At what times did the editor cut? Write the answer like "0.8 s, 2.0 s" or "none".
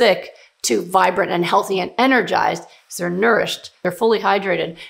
3.8 s